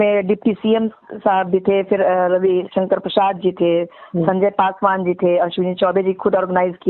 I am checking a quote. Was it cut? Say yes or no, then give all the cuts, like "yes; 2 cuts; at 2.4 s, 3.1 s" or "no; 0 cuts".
no; 0 cuts